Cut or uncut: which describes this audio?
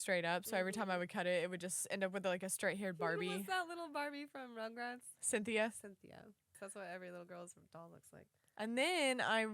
cut